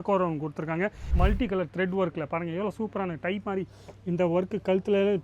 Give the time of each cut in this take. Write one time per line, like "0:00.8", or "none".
0:01.0